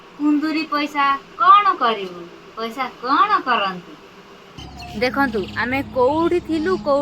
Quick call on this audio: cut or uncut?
cut